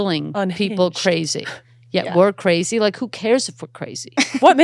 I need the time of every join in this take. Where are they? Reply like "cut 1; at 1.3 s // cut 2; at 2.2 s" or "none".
none